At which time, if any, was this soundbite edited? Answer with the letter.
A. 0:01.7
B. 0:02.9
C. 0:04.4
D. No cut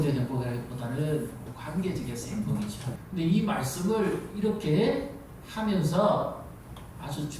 B